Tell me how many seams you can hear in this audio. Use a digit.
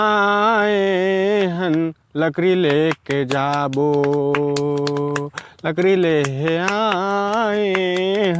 0